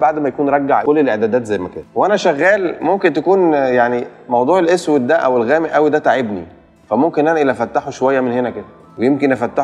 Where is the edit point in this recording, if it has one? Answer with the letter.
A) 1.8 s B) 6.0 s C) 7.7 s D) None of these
A